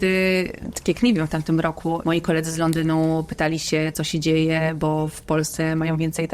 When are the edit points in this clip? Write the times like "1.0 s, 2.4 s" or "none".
2.0 s